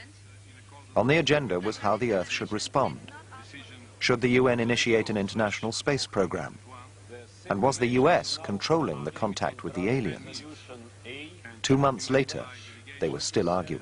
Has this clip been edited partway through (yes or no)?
no